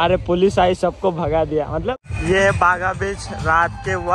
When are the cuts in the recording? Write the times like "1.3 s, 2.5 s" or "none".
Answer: 2.0 s